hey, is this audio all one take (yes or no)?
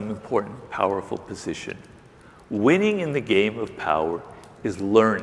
yes